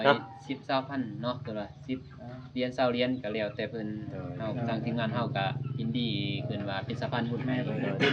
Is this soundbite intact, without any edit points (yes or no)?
yes